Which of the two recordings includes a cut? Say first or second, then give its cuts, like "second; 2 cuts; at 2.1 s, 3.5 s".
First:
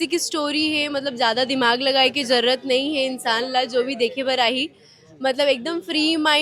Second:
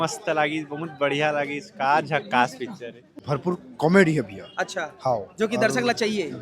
second; 1 cut; at 3.2 s